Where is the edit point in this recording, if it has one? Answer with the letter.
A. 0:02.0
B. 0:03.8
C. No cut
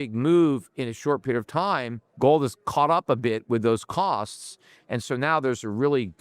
A